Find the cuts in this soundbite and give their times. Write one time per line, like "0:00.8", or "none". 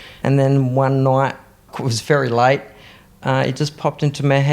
0:01.7